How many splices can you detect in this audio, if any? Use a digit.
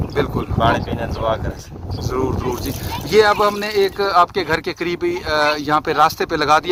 0